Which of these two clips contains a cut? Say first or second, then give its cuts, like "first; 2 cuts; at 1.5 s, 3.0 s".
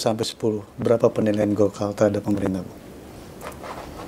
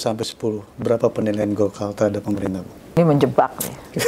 second; 1 cut; at 3.0 s